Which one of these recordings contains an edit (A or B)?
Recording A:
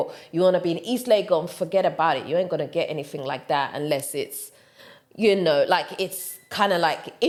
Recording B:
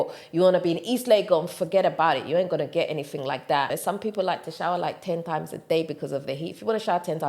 B